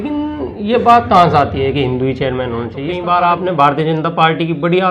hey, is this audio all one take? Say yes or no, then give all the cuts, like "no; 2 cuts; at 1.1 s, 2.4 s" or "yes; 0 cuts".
no; 1 cut; at 2.9 s